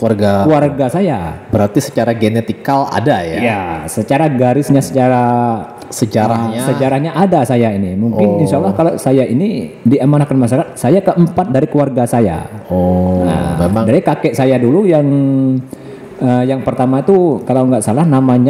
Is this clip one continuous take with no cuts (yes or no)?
yes